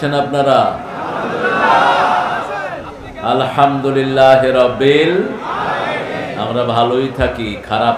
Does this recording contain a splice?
no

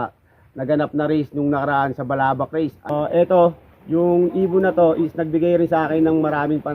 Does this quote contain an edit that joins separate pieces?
yes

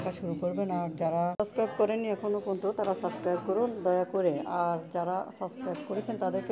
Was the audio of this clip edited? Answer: yes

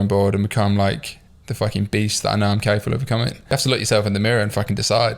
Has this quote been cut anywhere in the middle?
yes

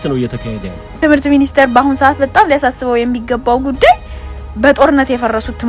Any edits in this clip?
yes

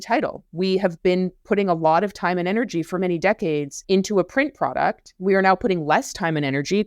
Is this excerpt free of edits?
no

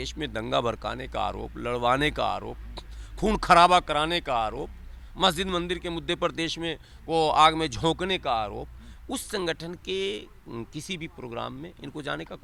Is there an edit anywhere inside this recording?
no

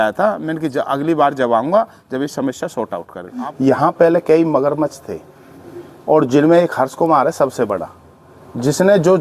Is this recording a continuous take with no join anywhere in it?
no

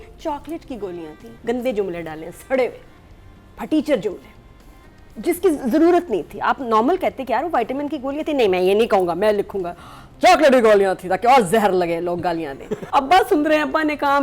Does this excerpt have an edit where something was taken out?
yes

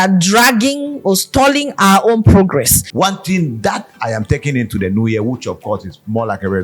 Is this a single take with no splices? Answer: no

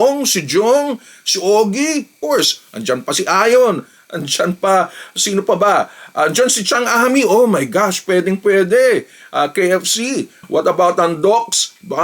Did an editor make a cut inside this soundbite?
no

